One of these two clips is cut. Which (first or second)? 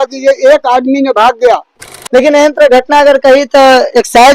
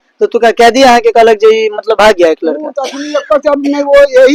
first